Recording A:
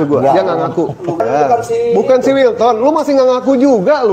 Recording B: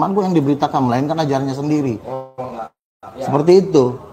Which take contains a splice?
A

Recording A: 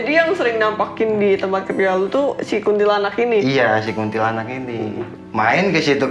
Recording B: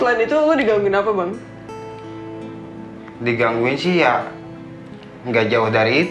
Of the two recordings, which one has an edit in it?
A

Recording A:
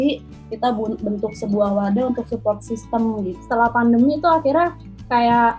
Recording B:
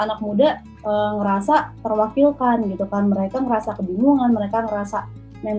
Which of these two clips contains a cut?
A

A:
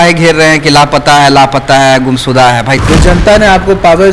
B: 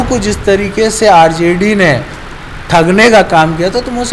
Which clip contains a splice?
A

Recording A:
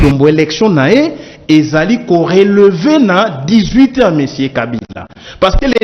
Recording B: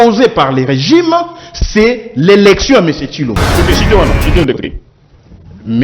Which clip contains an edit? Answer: B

